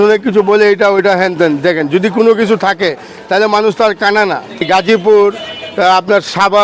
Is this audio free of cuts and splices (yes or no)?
no